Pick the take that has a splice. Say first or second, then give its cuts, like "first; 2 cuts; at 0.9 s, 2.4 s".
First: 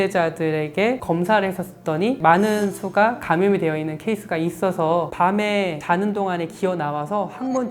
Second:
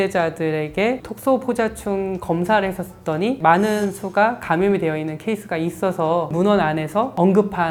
first; 2 cuts; at 1.0 s, 5.1 s